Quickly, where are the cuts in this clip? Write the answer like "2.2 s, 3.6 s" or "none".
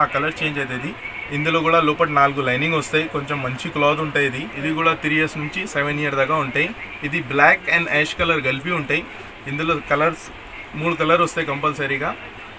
1.1 s, 4.5 s